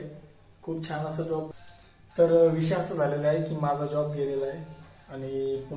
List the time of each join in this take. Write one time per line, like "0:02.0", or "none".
0:01.5